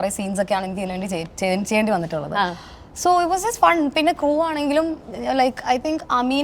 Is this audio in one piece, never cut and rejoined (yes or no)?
yes